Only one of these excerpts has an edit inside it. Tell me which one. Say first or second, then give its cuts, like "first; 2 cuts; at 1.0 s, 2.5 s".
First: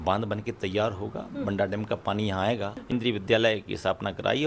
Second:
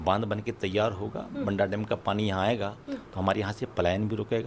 first; 1 cut; at 2.9 s